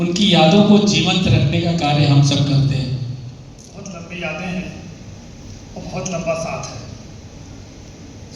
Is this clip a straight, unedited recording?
no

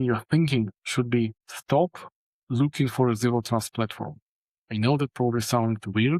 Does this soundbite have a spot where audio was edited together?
yes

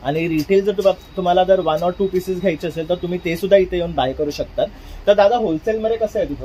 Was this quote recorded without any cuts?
yes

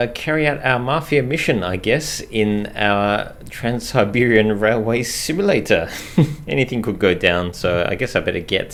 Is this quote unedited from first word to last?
yes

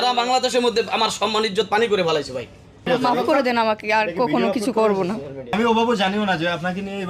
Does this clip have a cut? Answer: yes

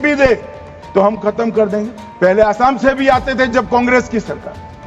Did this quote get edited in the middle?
yes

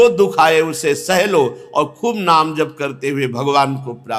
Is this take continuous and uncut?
yes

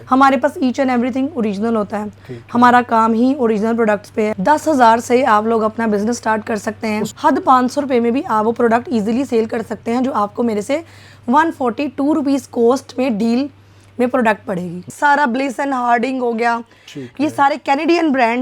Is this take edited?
yes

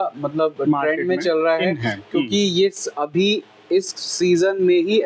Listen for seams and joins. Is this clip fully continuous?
yes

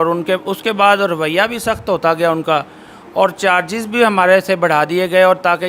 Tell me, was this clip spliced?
no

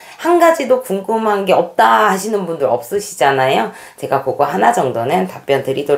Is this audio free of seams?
yes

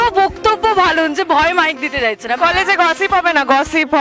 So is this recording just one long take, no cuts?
no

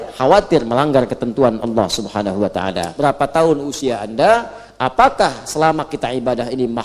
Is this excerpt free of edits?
no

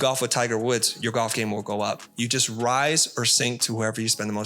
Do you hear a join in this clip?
no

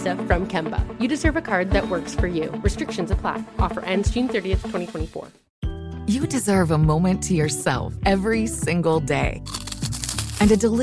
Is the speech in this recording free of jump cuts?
no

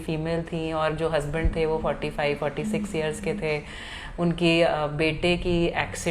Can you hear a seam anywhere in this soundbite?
no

